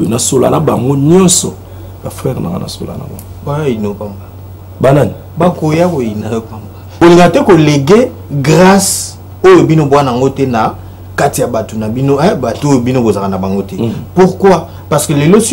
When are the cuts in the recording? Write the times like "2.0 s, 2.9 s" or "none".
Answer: 7.0 s